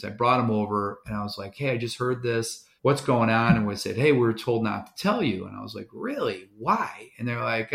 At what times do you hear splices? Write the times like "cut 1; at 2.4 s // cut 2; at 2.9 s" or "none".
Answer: cut 1; at 2.6 s

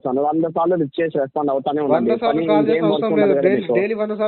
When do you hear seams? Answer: none

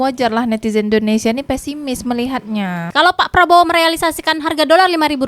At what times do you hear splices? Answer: cut 1; at 2.8 s

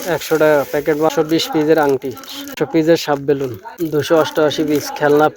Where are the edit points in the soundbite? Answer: cut 1; at 1.1 s // cut 2; at 2.5 s // cut 3; at 3.6 s

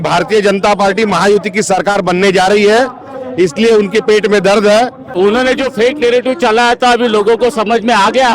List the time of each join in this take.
cut 1; at 5.1 s

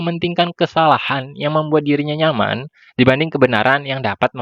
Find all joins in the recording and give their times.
none

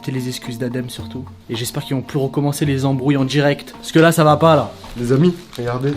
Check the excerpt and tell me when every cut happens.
none

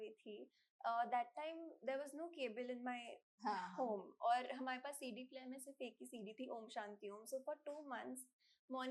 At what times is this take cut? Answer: none

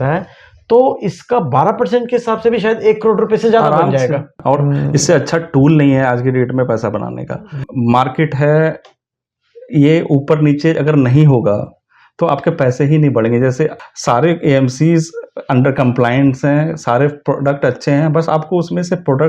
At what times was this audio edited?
cut 1; at 4.3 s // cut 2; at 7.6 s // cut 3; at 13.8 s

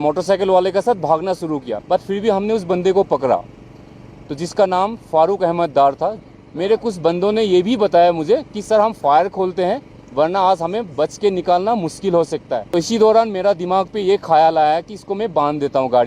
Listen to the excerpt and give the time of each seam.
cut 1; at 1.8 s // cut 2; at 6.3 s // cut 3; at 12.6 s

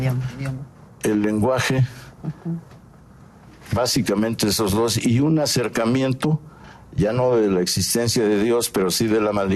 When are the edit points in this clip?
none

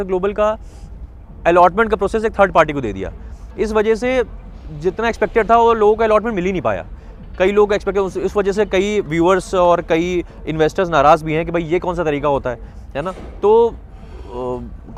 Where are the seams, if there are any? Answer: none

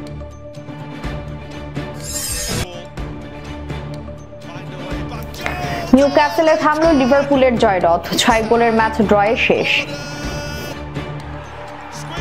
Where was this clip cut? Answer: cut 1; at 2.1 s

